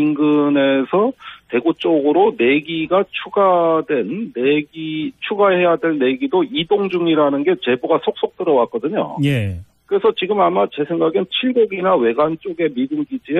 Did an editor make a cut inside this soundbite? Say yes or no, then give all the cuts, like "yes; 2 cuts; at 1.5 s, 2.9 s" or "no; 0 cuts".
no; 0 cuts